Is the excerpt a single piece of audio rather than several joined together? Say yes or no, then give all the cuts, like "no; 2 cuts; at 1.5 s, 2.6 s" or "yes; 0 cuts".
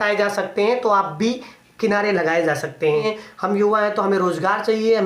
no; 1 cut; at 3.2 s